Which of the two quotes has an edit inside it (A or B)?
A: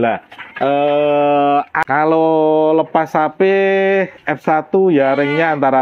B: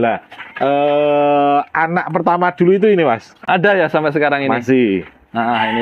A